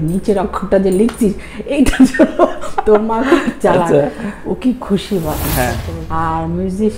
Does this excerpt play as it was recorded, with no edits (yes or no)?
no